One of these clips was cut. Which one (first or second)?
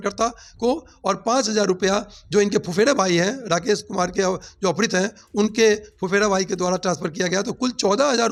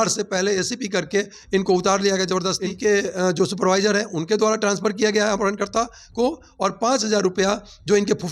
second